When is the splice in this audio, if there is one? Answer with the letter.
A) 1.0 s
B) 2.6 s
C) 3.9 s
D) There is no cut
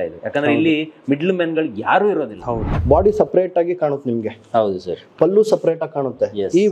B